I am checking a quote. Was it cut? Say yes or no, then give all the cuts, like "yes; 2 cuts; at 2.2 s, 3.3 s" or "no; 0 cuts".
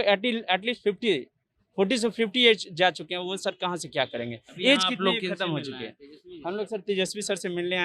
no; 0 cuts